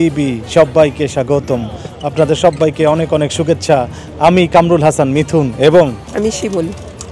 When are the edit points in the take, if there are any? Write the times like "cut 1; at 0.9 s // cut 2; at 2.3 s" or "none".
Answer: none